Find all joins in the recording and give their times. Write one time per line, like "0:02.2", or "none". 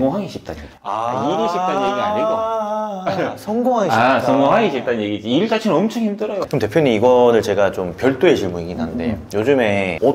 0:06.5